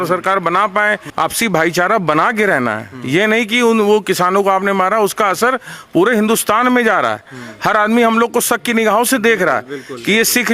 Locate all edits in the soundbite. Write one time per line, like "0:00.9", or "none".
0:01.0

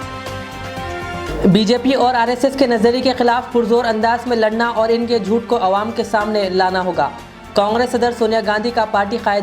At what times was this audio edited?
0:01.2

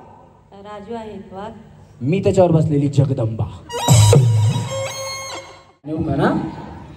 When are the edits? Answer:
0:05.9

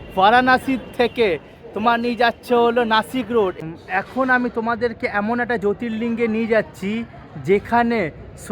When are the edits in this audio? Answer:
0:03.5

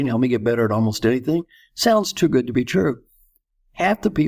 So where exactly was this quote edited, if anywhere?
none

